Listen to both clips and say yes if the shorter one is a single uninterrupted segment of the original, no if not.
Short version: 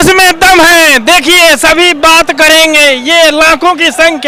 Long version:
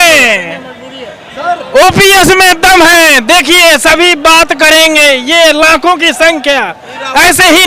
yes